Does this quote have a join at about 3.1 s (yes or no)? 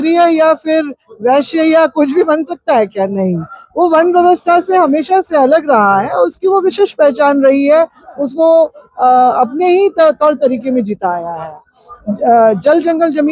no